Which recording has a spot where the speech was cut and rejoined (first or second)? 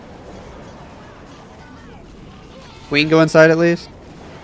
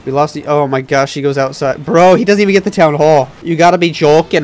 second